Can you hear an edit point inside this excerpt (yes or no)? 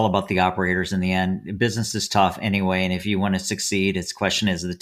no